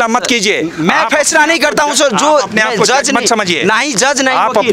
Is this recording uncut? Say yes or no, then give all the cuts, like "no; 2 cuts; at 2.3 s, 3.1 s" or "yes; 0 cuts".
yes; 0 cuts